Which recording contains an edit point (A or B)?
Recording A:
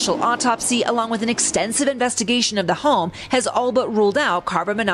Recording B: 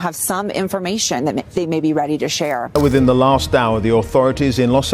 B